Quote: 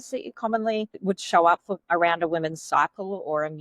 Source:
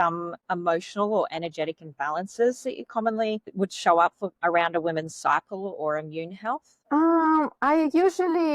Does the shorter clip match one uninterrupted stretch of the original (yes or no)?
yes